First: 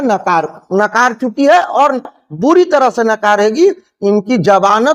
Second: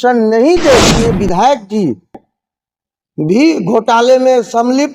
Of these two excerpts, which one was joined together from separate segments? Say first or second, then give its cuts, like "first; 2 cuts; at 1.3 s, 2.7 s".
second; 1 cut; at 1.0 s